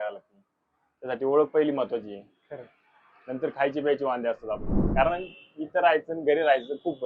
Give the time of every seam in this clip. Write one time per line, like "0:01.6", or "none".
0:04.8